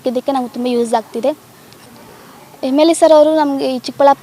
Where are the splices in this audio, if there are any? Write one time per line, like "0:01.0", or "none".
none